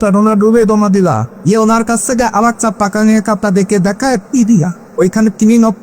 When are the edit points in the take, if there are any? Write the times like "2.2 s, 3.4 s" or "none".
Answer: 1.3 s, 4.8 s